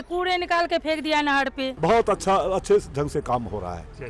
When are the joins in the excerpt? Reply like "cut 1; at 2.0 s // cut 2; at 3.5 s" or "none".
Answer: cut 1; at 1.7 s